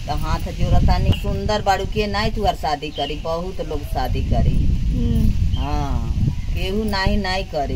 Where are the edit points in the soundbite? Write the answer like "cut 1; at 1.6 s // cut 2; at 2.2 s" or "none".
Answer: cut 1; at 1.2 s